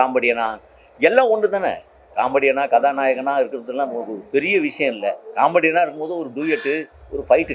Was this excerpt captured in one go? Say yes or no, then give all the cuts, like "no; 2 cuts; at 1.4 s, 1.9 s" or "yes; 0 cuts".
yes; 0 cuts